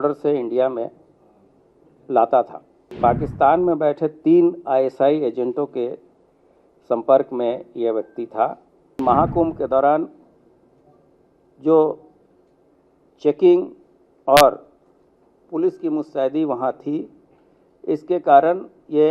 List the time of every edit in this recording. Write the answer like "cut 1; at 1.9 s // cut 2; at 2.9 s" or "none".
cut 1; at 3.0 s // cut 2; at 9.0 s